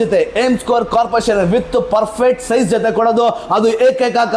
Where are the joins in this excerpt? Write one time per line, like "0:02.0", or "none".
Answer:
none